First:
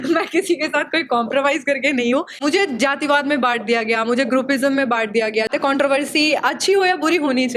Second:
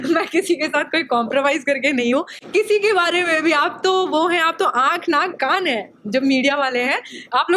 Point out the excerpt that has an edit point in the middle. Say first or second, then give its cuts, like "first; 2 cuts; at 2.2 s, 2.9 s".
first; 2 cuts; at 2.4 s, 5.5 s